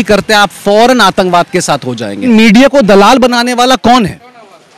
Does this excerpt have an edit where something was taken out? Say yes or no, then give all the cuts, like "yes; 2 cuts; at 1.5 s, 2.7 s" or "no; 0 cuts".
yes; 1 cut; at 2.3 s